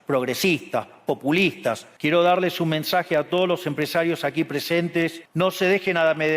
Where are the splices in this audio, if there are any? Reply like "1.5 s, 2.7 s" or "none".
1.9 s, 5.2 s